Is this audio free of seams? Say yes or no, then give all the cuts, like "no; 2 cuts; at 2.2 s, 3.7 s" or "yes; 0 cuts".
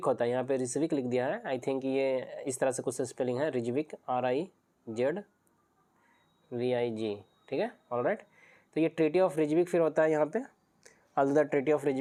yes; 0 cuts